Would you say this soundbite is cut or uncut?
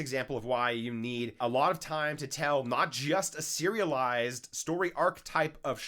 cut